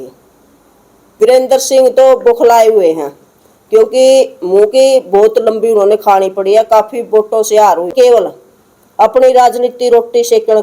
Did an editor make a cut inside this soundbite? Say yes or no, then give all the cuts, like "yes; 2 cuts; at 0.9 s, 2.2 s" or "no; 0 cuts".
yes; 2 cuts; at 1.2 s, 7.9 s